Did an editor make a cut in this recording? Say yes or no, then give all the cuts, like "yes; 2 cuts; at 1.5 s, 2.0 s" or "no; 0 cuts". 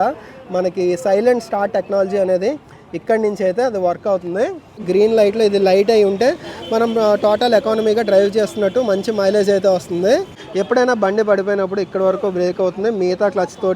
yes; 2 cuts; at 4.8 s, 10.3 s